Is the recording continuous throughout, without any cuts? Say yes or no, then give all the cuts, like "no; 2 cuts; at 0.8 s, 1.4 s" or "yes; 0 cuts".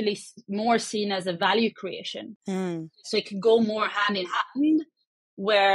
yes; 0 cuts